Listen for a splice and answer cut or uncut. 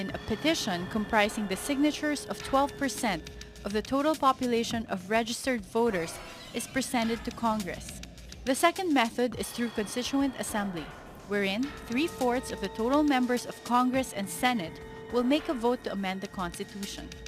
cut